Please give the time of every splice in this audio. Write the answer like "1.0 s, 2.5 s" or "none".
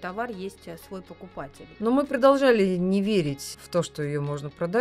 1.7 s, 3.5 s